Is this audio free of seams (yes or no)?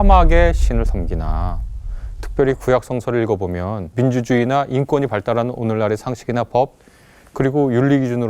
no